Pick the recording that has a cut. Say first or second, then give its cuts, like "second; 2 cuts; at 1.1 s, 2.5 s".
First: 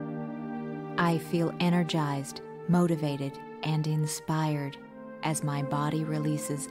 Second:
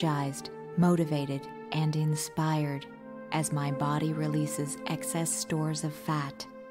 first; 1 cut; at 0.9 s